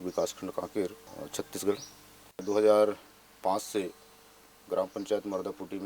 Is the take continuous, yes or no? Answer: no